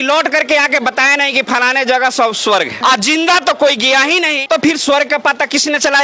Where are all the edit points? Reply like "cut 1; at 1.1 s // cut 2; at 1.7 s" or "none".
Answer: cut 1; at 2.8 s